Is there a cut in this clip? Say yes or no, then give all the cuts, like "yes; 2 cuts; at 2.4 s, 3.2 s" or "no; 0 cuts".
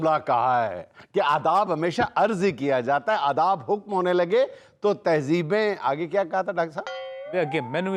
no; 0 cuts